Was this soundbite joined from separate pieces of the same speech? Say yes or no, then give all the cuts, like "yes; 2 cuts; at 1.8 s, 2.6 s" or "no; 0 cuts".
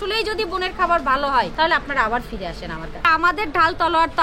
yes; 2 cuts; at 1.5 s, 3.1 s